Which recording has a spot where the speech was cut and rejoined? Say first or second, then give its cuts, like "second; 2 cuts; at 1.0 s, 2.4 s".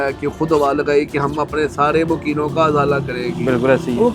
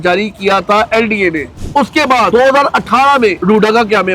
second; 2 cuts; at 2.0 s, 3.4 s